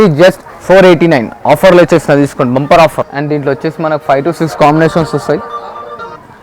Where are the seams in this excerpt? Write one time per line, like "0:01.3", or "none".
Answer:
0:03.1